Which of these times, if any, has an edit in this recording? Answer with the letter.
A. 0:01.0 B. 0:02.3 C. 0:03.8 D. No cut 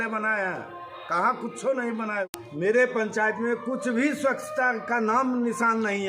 B